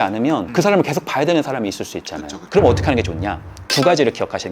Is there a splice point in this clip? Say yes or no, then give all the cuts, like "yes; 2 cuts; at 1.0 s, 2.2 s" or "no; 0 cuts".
yes; 1 cut; at 2.3 s